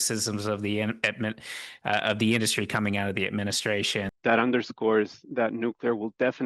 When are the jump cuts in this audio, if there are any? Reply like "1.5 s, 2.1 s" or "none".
4.1 s